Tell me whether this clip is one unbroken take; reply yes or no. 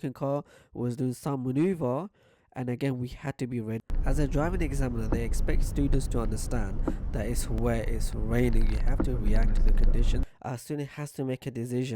no